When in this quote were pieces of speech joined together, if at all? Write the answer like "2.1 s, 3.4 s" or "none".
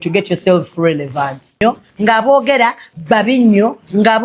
1.6 s

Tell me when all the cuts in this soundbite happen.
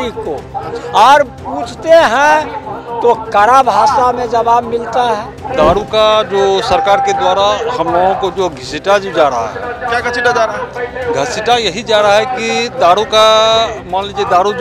5.4 s

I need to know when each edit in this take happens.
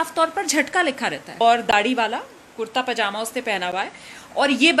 1.4 s

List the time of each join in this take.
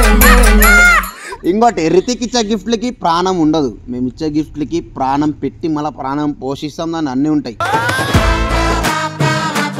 1.1 s

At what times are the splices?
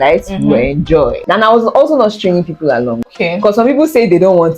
1.2 s, 3.1 s

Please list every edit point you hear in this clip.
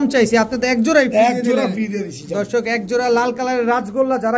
none

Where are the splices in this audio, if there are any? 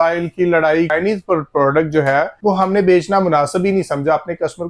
0.9 s, 2.3 s

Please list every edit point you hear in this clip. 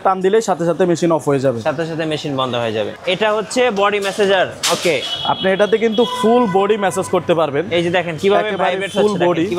3.0 s

